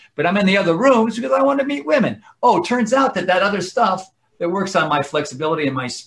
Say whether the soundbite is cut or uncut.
uncut